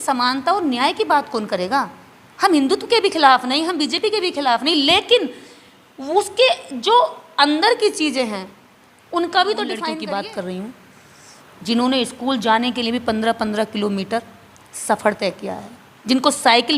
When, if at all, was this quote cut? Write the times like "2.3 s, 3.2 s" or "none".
9.9 s